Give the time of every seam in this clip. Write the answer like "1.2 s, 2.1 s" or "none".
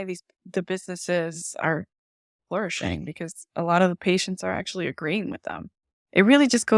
none